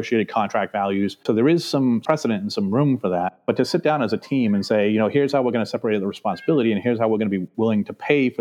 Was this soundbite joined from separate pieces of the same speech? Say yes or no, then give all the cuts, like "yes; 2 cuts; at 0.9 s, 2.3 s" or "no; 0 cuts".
no; 0 cuts